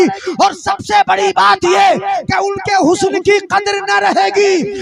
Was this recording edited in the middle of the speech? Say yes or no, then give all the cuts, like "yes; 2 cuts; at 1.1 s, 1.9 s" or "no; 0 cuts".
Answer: no; 0 cuts